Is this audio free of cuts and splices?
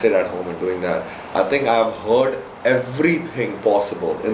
yes; 0 cuts

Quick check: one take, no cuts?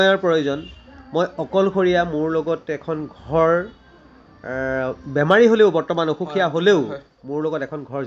yes; 0 cuts

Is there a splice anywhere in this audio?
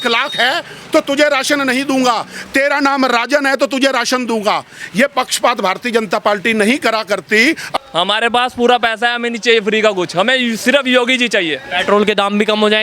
yes; 1 cut; at 7.7 s

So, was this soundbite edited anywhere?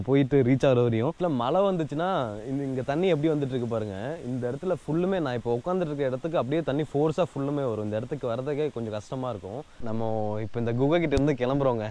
yes; 2 cuts; at 1.1 s, 9.8 s

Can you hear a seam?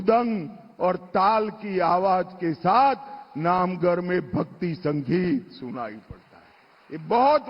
yes; 1 cut; at 2.3 s

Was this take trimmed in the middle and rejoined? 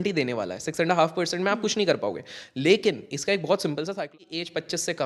yes; 1 cut; at 4.1 s

